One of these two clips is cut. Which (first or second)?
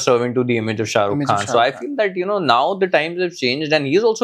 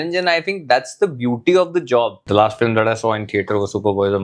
second